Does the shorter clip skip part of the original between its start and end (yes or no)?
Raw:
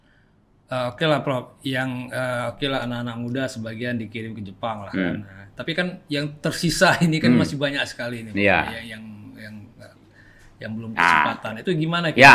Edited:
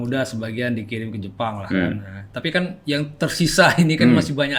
no